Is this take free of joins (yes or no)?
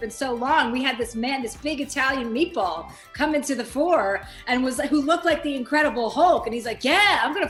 yes